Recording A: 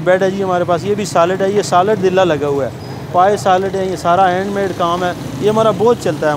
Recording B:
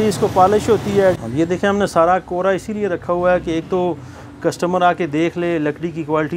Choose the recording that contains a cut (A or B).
B